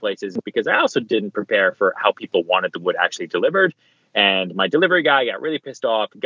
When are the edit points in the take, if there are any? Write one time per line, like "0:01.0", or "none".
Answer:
none